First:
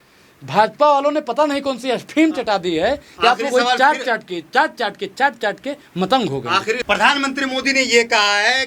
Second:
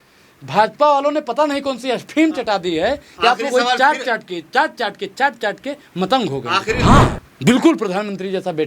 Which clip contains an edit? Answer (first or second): second